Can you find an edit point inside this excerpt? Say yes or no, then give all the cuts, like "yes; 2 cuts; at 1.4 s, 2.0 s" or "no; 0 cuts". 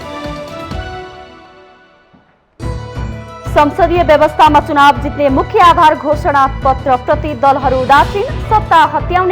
yes; 1 cut; at 1.5 s